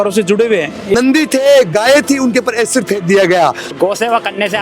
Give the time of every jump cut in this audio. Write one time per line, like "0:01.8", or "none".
0:00.9
0:03.7